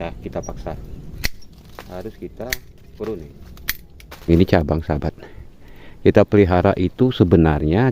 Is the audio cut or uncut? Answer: cut